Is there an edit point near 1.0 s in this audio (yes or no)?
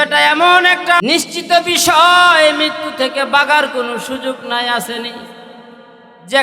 yes